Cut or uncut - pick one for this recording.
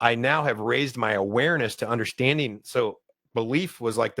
cut